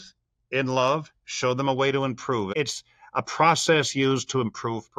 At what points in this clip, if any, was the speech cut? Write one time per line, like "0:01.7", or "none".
0:02.5